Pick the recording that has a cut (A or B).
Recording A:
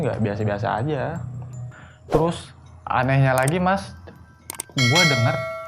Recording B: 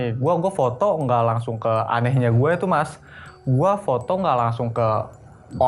A